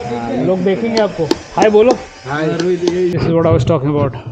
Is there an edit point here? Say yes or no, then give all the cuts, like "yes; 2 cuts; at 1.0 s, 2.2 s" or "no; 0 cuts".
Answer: yes; 1 cut; at 3.1 s